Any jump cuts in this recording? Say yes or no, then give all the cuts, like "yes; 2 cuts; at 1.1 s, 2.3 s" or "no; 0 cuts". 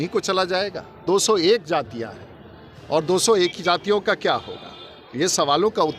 yes; 1 cut; at 1.0 s